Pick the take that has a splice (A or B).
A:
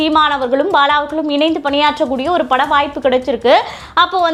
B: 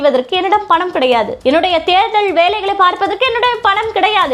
B